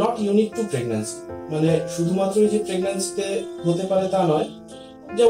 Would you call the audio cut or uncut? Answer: uncut